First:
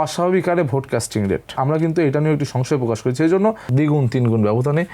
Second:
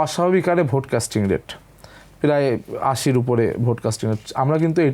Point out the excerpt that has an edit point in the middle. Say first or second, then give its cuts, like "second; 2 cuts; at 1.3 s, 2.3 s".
first; 2 cuts; at 1.5 s, 3.6 s